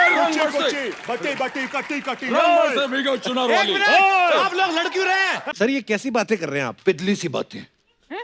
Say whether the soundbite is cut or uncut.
cut